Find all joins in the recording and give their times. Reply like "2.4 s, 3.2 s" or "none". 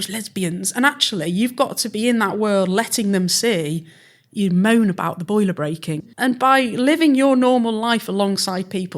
5.9 s